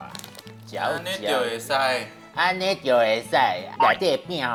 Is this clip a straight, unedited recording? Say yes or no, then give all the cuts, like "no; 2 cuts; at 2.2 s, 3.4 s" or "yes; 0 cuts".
yes; 0 cuts